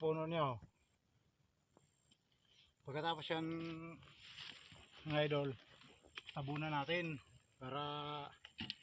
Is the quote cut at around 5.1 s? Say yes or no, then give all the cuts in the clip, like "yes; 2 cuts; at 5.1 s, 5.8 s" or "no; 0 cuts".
no; 1 cut; at 0.9 s